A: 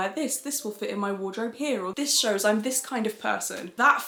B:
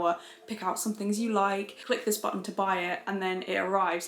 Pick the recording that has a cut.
B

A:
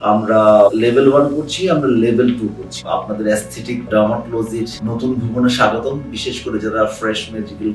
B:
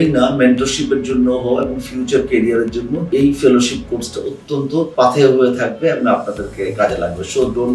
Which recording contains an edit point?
A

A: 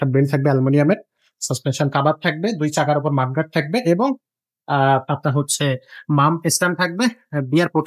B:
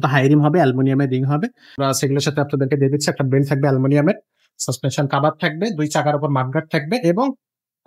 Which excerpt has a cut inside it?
B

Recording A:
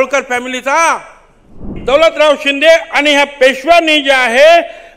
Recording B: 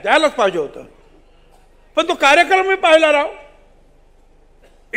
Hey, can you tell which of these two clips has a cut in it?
A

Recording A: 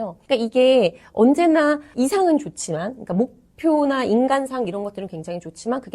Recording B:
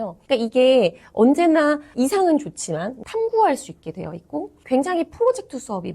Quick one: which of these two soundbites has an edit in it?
B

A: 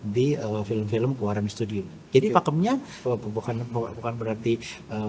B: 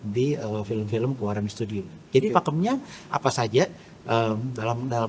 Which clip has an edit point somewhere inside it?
A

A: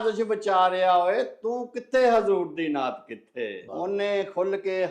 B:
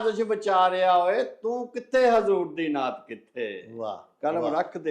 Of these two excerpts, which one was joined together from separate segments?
A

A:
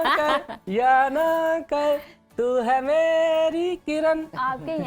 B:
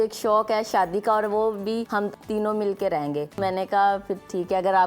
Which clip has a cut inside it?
B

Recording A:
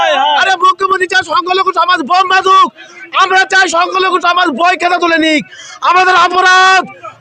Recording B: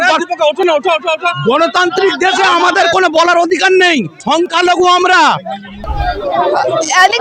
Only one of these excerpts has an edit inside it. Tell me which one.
B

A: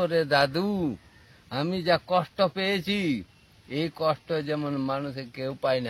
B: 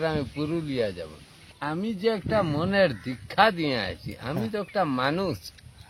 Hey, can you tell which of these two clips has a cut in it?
B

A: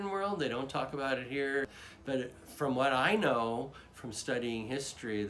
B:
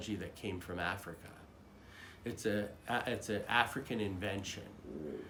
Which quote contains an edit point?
A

